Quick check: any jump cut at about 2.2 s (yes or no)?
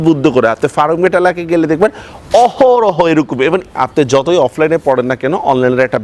no